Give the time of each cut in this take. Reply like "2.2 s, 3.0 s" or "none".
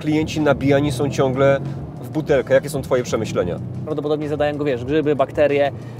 3.8 s